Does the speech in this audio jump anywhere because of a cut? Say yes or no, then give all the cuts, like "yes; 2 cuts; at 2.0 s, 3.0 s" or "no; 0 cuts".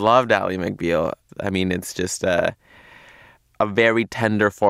yes; 1 cut; at 1.2 s